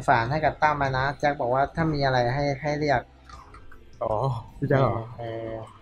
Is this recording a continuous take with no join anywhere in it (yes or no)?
yes